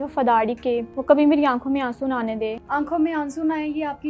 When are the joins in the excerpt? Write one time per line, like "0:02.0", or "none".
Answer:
0:00.9
0:02.6